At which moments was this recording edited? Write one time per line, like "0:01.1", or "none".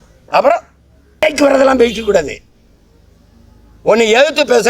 0:01.2